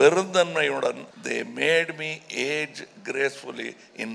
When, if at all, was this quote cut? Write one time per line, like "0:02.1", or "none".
0:01.1